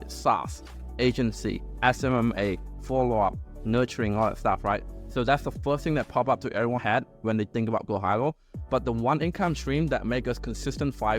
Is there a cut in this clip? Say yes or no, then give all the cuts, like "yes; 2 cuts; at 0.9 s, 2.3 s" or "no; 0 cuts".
no; 0 cuts